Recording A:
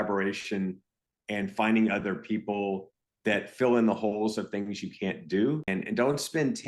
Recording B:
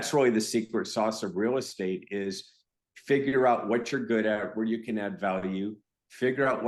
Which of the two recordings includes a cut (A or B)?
A